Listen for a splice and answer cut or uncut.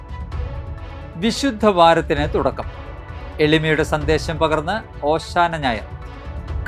cut